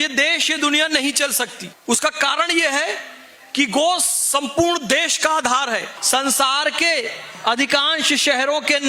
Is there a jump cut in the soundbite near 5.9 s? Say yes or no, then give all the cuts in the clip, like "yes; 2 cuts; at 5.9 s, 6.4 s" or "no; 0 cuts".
yes; 2 cuts; at 1.7 s, 5.9 s